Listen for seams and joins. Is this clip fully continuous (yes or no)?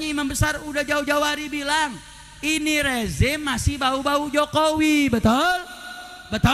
yes